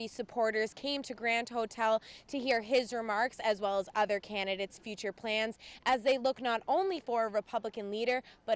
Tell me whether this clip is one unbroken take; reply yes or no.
yes